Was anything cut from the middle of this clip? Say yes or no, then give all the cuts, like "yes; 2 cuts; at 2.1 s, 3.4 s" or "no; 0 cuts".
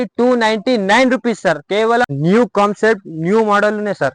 yes; 1 cut; at 2.1 s